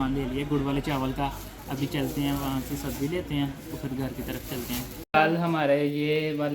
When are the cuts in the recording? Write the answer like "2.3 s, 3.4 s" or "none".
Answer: 5.0 s